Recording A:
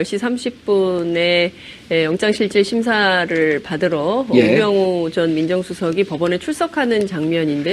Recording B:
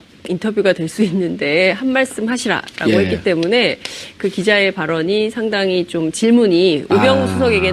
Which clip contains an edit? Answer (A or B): B